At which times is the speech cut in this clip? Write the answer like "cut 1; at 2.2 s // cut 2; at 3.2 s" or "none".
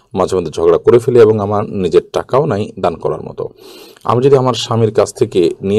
none